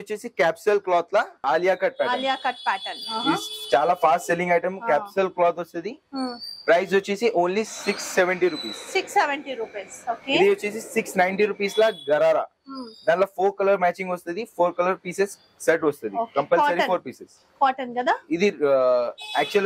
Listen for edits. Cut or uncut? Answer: uncut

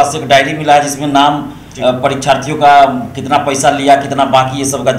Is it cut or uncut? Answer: uncut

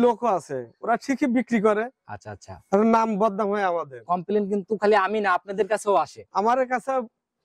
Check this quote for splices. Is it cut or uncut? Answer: uncut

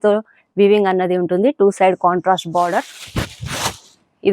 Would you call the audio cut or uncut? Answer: uncut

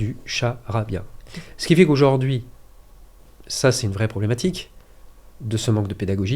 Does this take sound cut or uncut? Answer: uncut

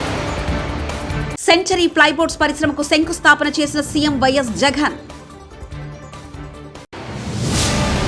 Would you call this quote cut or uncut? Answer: uncut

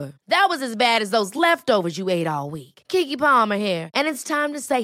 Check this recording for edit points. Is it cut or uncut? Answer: uncut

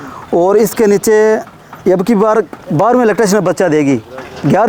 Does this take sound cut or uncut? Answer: uncut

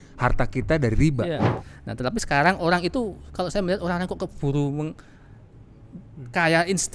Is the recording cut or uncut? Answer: cut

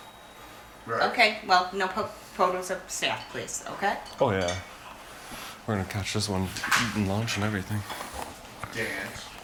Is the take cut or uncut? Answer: uncut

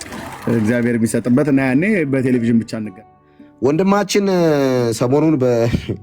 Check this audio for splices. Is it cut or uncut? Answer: cut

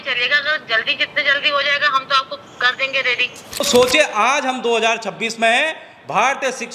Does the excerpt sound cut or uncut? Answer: cut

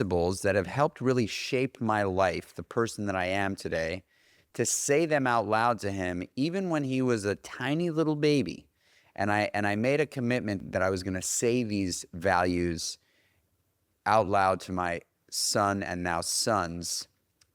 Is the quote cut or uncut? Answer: cut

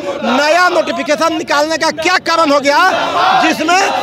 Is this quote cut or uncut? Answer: uncut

